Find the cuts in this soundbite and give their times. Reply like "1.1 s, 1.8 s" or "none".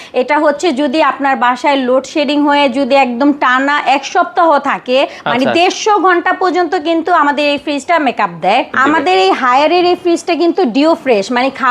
8.7 s